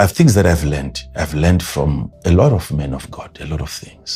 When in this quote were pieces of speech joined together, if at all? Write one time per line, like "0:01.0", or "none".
0:02.1